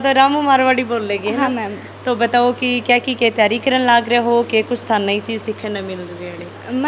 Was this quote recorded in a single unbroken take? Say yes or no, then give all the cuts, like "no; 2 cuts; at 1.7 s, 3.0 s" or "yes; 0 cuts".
yes; 0 cuts